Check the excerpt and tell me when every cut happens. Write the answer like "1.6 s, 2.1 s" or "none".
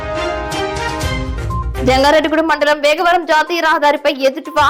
none